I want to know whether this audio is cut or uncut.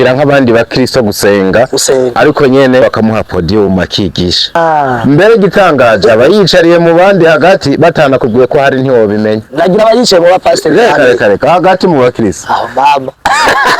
cut